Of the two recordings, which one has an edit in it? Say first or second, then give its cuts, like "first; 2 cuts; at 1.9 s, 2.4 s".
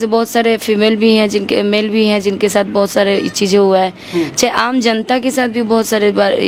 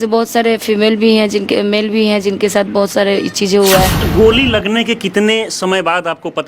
second; 1 cut; at 4.0 s